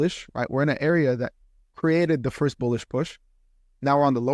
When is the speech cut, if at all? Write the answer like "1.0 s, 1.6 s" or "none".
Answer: none